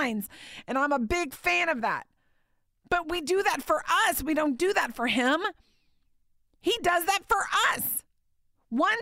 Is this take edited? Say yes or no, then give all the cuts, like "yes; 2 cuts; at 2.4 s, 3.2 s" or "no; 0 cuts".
yes; 1 cut; at 3.0 s